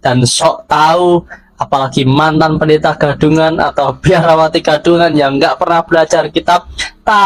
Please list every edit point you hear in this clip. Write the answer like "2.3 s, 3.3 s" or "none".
none